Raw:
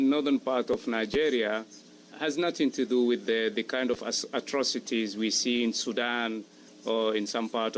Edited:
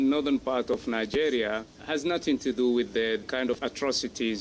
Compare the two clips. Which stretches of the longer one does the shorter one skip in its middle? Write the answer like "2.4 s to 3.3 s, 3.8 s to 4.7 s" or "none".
1.7 s to 2.0 s, 3.6 s to 4.0 s